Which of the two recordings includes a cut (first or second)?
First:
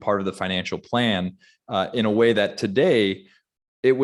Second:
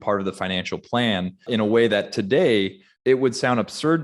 second